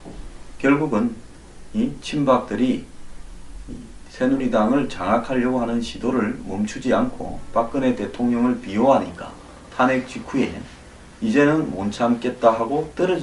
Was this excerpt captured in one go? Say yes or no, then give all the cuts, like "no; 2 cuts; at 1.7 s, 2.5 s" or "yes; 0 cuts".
no; 1 cut; at 10.6 s